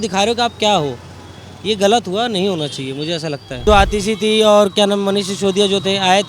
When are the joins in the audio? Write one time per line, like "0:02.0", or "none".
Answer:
0:03.6